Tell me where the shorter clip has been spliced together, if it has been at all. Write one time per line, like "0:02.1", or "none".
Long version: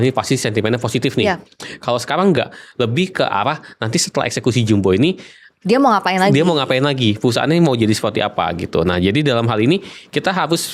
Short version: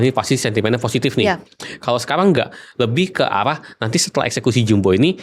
none